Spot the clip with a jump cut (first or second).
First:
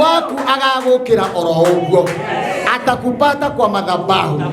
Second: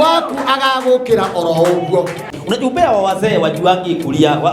second